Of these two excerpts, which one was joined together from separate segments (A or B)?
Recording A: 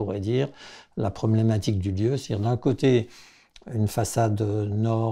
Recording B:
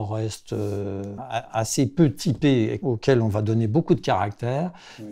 B